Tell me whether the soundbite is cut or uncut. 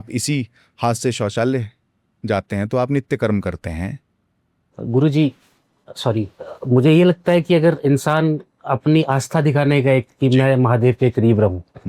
uncut